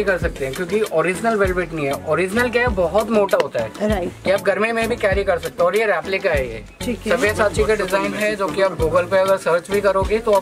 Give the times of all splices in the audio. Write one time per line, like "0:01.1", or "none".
none